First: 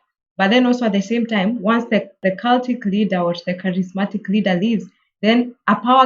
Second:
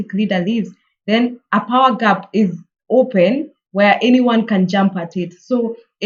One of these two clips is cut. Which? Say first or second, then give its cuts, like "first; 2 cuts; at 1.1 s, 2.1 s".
first; 1 cut; at 2.2 s